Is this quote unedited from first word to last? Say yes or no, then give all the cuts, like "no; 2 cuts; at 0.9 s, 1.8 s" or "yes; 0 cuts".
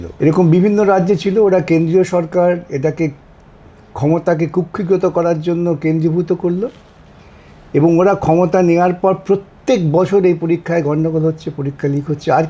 yes; 0 cuts